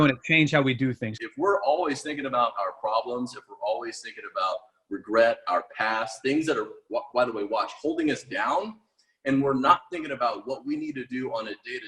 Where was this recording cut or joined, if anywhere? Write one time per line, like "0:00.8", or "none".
0:01.1

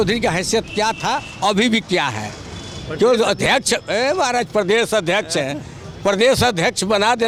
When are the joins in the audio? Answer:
none

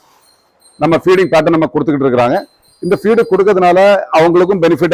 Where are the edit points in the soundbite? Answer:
none

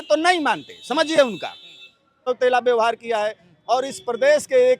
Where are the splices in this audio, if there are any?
0:02.2

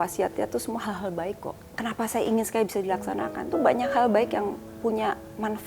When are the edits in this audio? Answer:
0:01.6

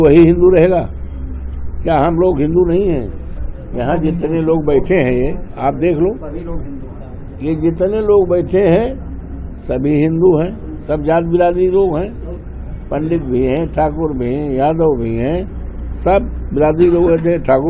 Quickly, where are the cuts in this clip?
none

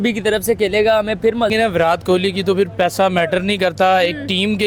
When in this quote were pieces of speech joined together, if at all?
0:01.5

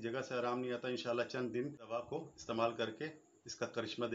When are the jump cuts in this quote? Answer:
0:02.1

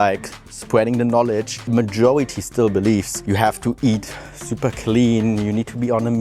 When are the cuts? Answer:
0:01.7
0:03.1

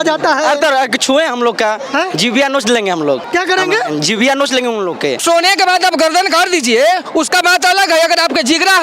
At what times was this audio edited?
0:03.2
0:05.2

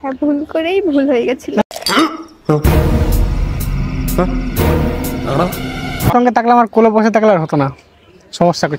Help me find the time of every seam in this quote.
0:06.1

